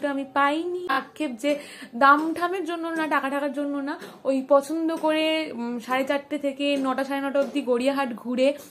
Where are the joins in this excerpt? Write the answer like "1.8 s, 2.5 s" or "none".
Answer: 1.0 s